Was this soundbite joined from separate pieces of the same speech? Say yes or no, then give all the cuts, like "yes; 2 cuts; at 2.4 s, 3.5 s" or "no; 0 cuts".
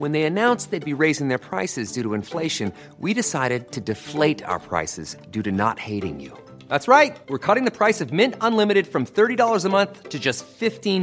no; 0 cuts